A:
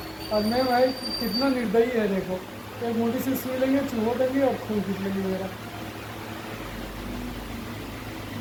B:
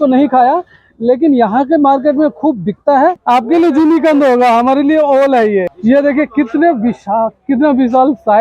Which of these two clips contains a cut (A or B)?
B